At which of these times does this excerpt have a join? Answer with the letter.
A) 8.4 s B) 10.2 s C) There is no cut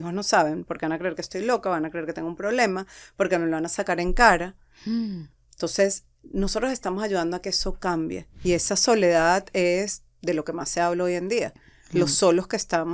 A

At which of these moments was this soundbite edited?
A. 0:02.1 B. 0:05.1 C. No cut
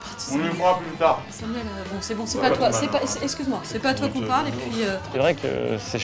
B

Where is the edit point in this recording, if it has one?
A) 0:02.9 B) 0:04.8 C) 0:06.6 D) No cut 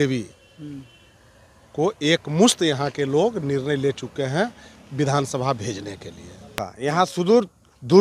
C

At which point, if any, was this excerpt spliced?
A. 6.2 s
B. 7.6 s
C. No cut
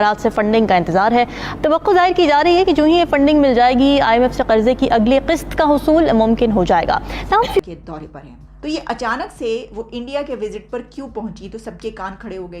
B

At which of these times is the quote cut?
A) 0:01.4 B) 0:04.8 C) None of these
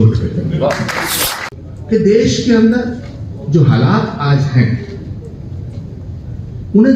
A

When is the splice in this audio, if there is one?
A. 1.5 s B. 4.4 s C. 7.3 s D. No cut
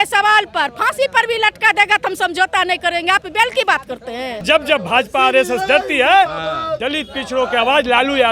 B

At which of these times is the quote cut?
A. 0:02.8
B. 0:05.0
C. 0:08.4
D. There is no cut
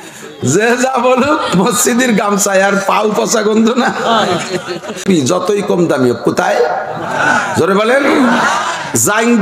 B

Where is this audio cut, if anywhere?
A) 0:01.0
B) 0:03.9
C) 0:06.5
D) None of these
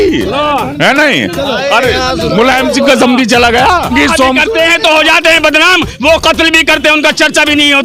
B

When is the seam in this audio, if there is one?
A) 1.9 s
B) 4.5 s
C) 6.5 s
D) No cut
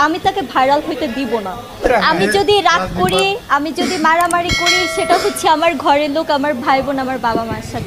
A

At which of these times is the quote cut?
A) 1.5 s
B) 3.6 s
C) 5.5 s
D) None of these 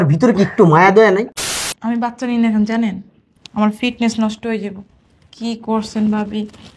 A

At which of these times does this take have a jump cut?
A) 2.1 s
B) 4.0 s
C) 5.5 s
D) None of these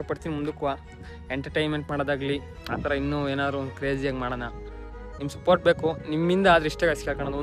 D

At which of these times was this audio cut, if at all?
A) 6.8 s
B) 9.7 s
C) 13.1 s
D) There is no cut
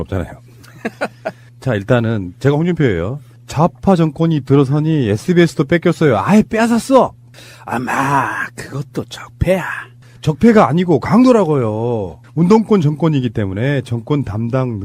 A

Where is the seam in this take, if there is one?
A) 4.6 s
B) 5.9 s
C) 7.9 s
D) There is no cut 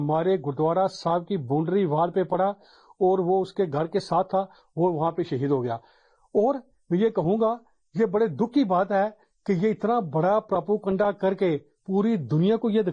D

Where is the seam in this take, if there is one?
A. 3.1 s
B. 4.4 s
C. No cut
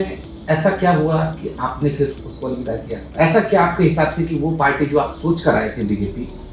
C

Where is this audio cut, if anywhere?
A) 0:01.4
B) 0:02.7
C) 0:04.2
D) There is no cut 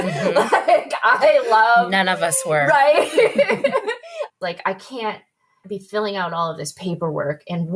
C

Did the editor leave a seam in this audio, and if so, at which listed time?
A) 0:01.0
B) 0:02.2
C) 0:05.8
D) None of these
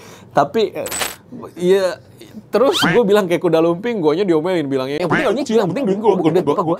A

